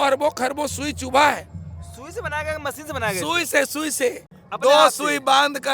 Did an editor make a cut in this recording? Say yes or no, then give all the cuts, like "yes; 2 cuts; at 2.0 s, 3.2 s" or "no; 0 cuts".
no; 0 cuts